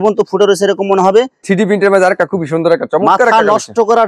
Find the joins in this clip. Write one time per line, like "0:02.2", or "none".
0:01.4